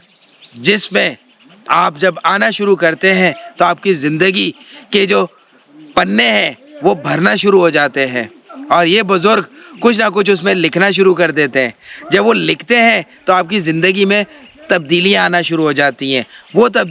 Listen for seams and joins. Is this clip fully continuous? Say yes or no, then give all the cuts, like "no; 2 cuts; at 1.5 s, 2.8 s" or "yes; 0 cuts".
yes; 0 cuts